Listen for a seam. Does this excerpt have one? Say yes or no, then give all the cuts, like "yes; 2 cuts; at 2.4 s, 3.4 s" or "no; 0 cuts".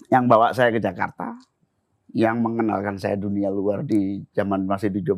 no; 0 cuts